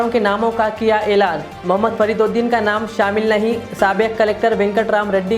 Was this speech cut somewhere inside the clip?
no; 0 cuts

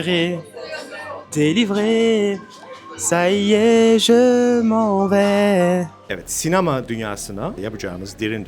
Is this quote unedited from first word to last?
no; 2 cuts; at 6.0 s, 7.6 s

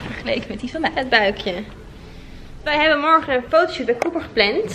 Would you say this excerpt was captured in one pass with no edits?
no; 1 cut; at 2.6 s

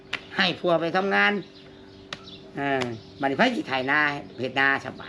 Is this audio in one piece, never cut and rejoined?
yes; 0 cuts

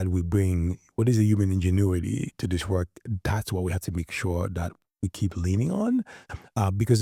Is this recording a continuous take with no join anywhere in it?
yes; 0 cuts

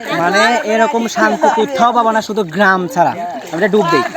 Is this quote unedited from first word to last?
yes; 0 cuts

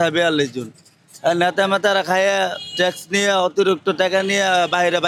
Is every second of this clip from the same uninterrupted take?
yes; 0 cuts

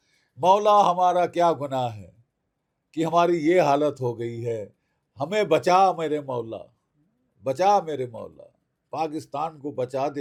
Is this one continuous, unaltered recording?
yes; 0 cuts

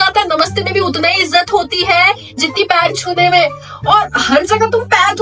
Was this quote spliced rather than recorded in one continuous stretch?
no; 0 cuts

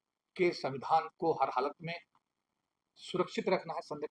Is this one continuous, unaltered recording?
yes; 0 cuts

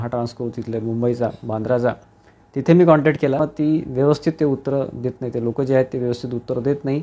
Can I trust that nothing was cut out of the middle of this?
yes; 0 cuts

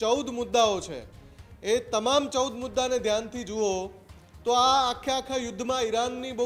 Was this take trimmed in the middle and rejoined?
no; 0 cuts

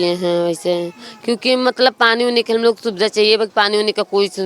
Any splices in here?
no; 0 cuts

